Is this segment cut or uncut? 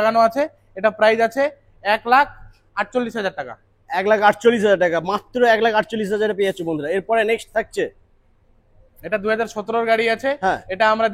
uncut